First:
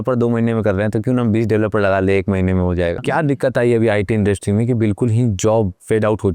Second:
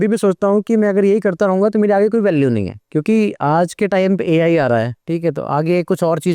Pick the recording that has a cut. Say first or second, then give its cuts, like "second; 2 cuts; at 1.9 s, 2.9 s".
first; 1 cut; at 3.0 s